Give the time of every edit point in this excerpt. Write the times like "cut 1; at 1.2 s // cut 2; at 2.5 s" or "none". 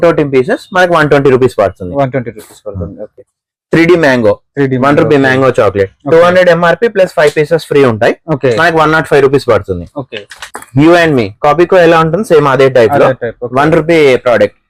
none